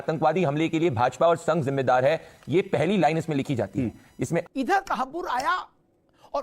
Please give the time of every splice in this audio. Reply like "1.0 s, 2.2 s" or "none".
4.4 s